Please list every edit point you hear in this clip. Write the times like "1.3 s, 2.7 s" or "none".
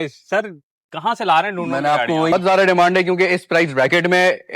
2.3 s